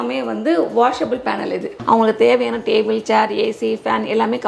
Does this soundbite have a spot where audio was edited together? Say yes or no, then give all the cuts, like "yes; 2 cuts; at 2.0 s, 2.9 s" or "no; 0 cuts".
yes; 1 cut; at 1.7 s